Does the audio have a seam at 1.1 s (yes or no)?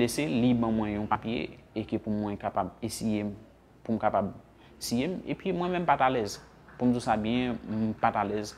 yes